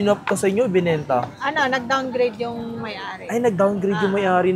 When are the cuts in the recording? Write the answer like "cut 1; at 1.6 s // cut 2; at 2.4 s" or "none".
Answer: none